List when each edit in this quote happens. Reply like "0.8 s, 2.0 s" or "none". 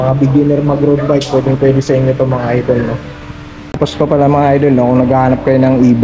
3.8 s